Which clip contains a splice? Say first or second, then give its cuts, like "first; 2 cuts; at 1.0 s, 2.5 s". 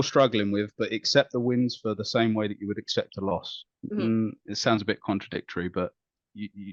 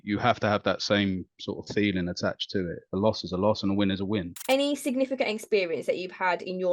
second; 1 cut; at 4.3 s